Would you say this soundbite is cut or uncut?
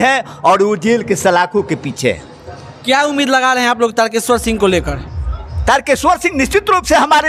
uncut